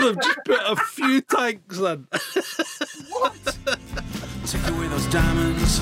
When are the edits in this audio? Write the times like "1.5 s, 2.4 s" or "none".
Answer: 4.3 s